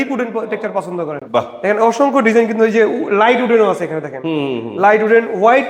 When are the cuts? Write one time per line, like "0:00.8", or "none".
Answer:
none